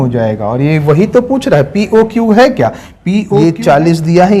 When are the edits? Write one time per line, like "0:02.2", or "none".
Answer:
0:03.4